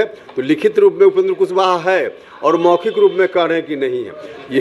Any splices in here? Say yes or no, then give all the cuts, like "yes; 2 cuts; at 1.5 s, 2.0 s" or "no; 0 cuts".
no; 0 cuts